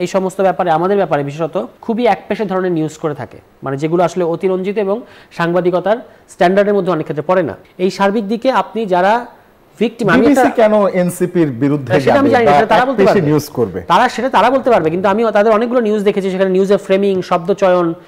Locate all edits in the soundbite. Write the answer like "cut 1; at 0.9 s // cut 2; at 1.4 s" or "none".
none